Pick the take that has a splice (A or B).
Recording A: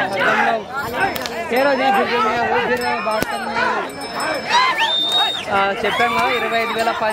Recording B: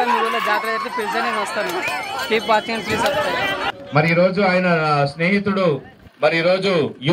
B